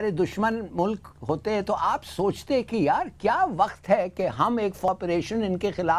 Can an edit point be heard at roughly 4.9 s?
yes; 1 cut; at 4.9 s

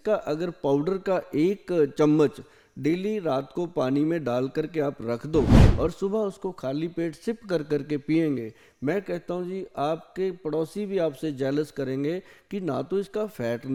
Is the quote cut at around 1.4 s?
no; 0 cuts

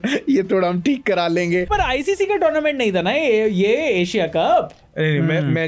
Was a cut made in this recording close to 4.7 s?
no; 1 cut; at 1.7 s

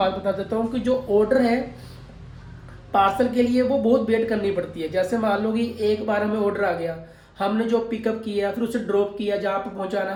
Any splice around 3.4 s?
no; 0 cuts

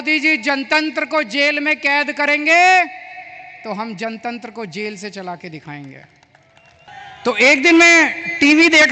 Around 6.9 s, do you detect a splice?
yes; 1 cut; at 6.9 s

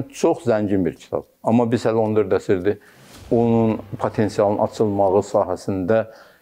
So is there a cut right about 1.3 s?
yes; 1 cut; at 1.3 s

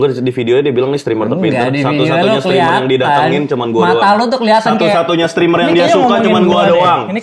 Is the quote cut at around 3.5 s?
no; 0 cuts

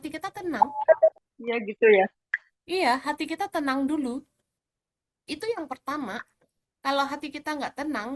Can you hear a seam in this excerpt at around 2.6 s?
no; 1 cut; at 1.3 s

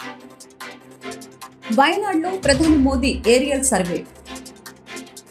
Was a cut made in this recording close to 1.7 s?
yes; 1 cut; at 1.7 s

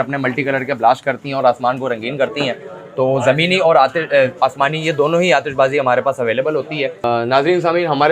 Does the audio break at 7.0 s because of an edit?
yes; 1 cut; at 7.0 s

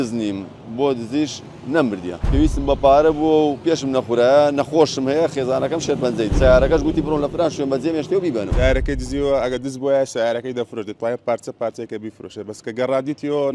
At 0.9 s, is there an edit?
no; 3 cuts; at 2.2 s, 6.3 s, 8.5 s

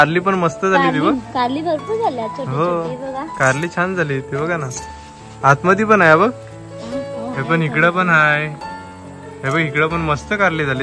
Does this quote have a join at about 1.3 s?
no; 0 cuts

